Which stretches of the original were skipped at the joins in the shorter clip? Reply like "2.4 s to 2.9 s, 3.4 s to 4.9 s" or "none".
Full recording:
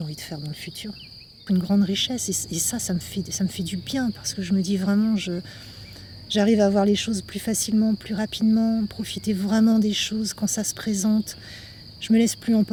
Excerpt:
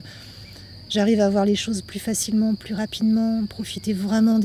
none